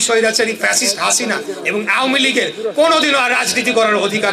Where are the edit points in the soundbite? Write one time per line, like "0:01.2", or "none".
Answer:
none